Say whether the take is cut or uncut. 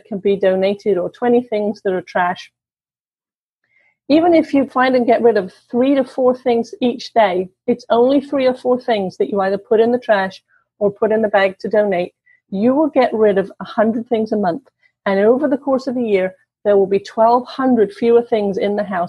cut